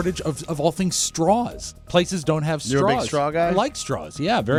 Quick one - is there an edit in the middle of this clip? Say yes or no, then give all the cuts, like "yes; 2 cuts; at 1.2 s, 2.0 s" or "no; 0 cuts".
no; 0 cuts